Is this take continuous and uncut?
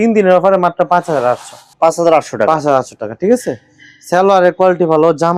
yes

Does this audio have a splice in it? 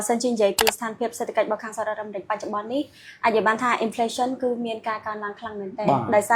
no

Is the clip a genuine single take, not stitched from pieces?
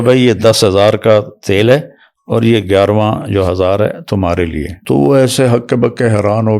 no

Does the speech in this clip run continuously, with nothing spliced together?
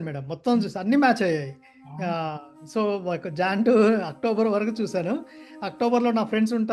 yes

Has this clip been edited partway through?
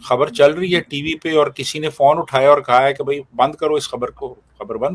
no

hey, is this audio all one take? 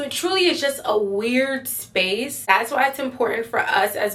no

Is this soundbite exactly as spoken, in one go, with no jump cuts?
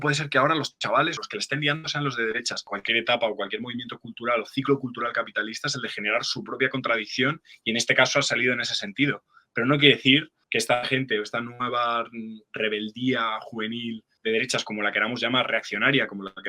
no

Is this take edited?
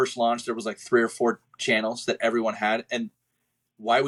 no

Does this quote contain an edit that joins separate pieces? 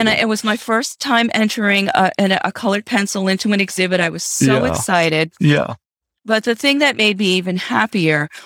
no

